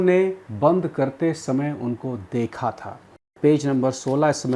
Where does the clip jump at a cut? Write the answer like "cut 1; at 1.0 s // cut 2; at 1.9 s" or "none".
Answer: cut 1; at 3.2 s